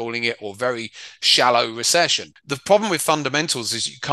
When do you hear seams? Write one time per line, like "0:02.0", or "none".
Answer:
0:02.5

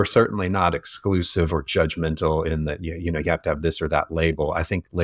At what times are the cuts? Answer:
none

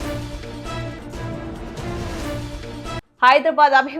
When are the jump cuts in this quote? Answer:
none

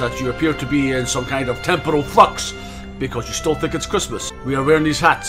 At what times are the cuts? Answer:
0:04.3

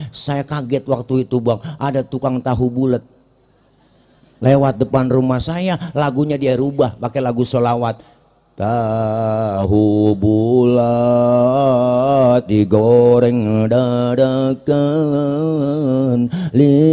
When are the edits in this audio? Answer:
0:09.7

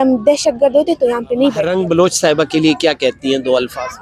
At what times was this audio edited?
0:01.6

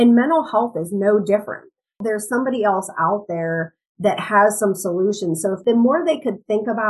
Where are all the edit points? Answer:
0:02.0
0:05.6

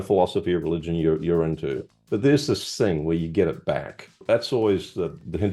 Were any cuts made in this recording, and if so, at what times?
0:04.2

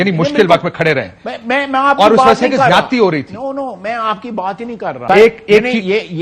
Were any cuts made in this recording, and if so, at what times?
0:04.9

